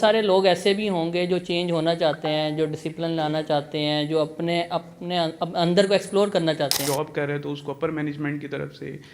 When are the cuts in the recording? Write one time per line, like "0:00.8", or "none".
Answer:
0:06.8